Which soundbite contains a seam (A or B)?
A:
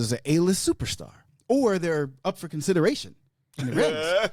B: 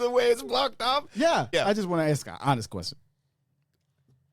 B